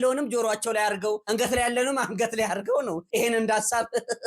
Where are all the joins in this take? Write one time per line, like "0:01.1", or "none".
0:03.0